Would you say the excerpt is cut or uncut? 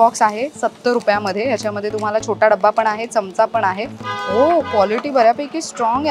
cut